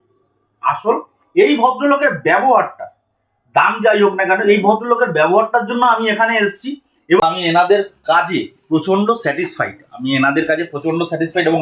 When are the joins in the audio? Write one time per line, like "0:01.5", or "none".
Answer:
0:07.2